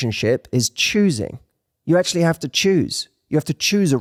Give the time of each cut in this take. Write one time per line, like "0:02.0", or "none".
none